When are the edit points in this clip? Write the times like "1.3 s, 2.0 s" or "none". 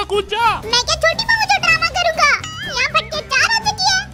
none